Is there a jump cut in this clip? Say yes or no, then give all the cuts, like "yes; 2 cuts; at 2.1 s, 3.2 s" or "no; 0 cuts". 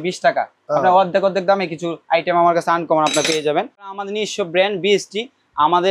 yes; 1 cut; at 3.9 s